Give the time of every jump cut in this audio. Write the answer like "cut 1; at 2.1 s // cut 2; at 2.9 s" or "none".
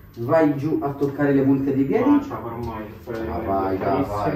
none